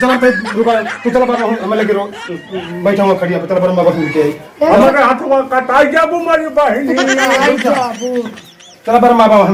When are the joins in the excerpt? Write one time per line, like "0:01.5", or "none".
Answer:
none